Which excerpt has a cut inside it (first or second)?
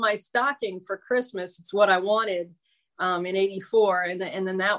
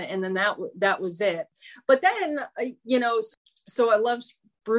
second